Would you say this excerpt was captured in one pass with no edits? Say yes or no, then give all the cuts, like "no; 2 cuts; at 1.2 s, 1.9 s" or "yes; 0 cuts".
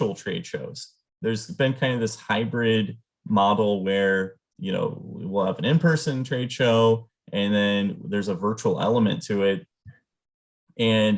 yes; 0 cuts